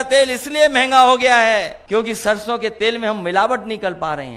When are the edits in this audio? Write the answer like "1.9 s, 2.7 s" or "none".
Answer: 1.8 s